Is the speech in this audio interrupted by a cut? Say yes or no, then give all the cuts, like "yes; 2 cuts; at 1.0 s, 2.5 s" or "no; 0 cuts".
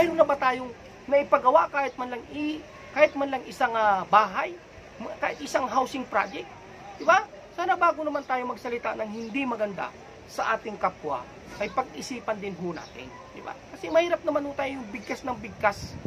no; 0 cuts